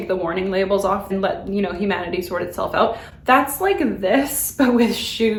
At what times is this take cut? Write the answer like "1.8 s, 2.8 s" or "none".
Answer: none